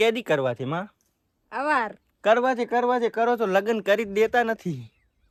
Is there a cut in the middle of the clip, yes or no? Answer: no